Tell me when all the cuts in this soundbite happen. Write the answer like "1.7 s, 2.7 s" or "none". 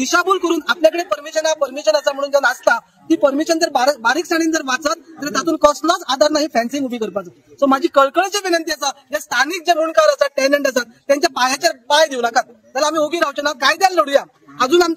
none